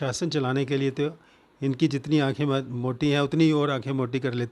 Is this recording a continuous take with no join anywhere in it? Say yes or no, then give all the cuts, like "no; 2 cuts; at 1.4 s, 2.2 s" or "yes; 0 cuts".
yes; 0 cuts